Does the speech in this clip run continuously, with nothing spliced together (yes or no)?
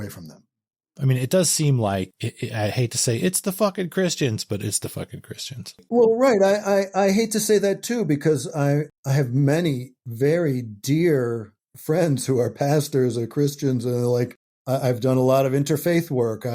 no